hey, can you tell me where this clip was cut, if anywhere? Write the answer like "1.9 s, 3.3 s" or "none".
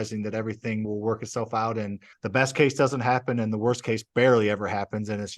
0.9 s, 2.1 s